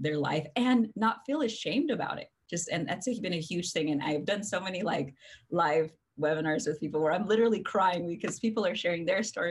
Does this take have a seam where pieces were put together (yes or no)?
no